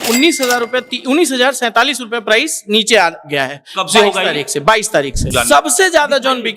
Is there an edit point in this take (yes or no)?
yes